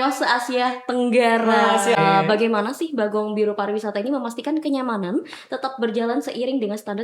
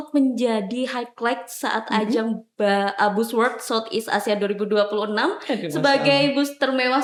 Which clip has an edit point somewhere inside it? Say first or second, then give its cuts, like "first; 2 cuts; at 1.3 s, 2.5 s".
first; 1 cut; at 2.0 s